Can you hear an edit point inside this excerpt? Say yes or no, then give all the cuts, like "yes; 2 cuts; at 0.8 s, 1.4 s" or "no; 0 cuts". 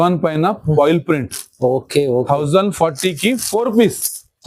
no; 0 cuts